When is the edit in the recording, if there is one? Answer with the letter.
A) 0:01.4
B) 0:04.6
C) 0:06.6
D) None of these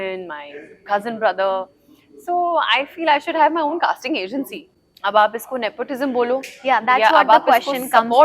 B